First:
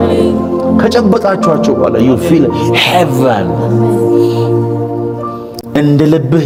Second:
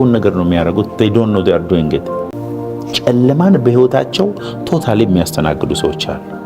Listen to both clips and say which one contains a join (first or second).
second